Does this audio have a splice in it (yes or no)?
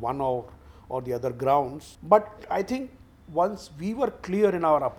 yes